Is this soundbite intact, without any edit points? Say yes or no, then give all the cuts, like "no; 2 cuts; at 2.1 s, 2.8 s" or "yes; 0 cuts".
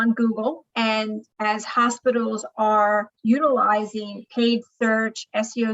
no; 1 cut; at 3.1 s